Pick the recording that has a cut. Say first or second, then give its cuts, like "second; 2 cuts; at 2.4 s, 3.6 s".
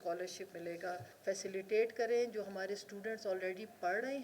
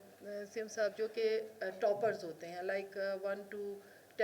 first; 1 cut; at 1.1 s